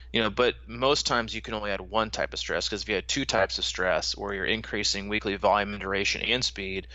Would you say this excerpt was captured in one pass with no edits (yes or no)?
yes